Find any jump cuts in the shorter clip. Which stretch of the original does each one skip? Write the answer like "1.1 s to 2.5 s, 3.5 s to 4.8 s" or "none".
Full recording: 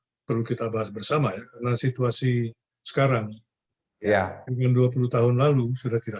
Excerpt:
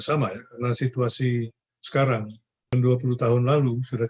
3.7 s to 4.6 s

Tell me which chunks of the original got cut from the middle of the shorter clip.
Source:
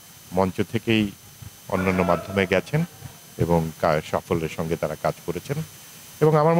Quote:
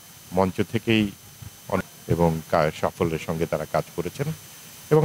1.8 s to 3.1 s

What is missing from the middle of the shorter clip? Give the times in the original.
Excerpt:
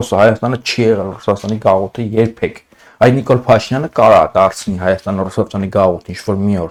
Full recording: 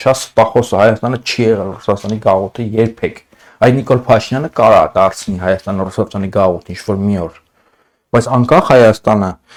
none

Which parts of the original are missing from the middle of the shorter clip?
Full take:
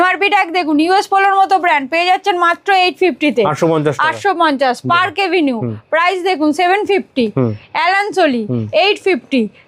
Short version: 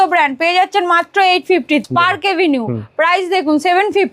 3.3 s to 4.8 s

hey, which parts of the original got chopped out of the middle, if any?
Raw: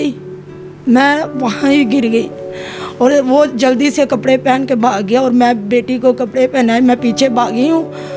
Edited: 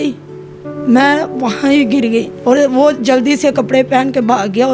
2.3 s to 2.9 s

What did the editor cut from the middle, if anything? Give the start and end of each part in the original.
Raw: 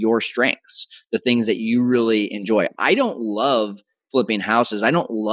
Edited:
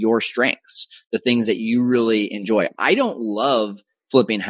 none

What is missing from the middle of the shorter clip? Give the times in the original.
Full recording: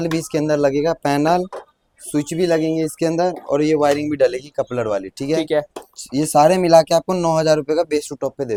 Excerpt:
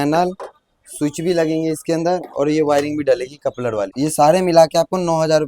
5.0 s to 6.1 s

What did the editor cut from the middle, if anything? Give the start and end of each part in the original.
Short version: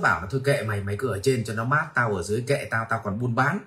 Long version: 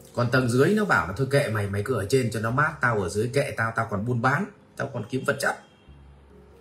none

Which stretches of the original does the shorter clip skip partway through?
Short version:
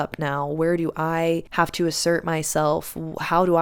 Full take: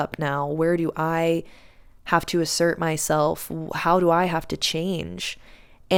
1.5 s to 2.0 s

